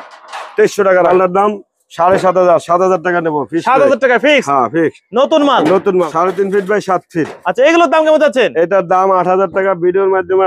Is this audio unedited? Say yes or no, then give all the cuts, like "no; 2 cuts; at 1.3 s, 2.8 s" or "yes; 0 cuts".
no; 2 cuts; at 1.1 s, 5.9 s